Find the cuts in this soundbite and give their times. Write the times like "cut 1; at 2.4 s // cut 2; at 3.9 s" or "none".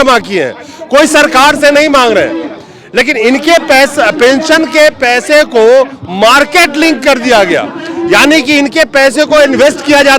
none